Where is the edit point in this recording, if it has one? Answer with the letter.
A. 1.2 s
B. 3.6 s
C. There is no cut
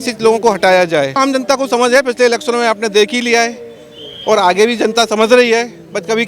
A